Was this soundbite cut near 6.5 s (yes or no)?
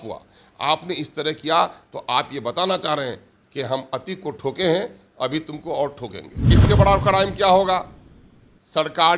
yes